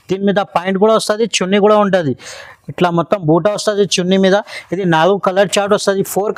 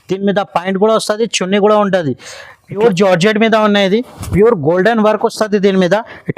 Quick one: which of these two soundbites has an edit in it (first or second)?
second